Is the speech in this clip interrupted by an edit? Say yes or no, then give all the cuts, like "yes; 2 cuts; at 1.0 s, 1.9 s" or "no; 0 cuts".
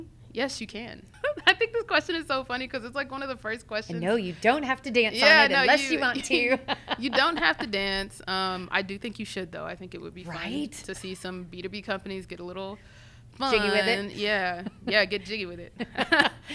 yes; 1 cut; at 1.0 s